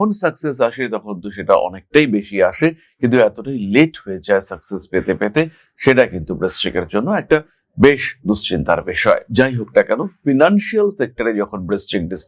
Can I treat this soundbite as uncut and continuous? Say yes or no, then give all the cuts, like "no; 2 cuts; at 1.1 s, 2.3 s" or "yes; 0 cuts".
yes; 0 cuts